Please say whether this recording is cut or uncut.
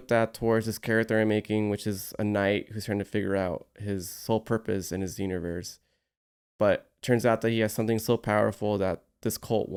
uncut